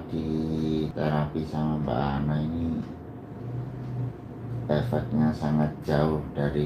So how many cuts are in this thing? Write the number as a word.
one